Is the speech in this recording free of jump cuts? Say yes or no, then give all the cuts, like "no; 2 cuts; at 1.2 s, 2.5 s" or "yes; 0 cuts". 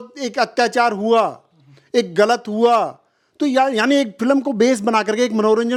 yes; 0 cuts